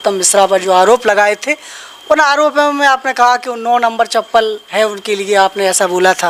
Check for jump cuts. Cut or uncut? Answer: uncut